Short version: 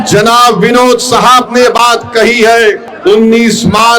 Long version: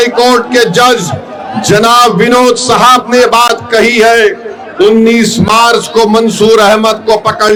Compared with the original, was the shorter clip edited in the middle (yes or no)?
yes